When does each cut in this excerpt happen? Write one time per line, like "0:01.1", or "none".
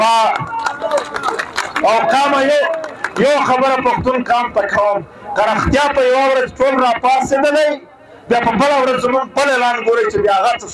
none